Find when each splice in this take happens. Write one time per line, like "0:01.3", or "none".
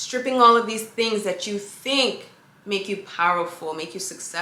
none